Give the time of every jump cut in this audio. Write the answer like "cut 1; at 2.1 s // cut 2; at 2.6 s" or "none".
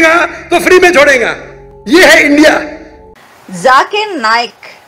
cut 1; at 3.1 s